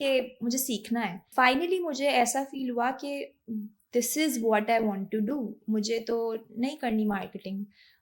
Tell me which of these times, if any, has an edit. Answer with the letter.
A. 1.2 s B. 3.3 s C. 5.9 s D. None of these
A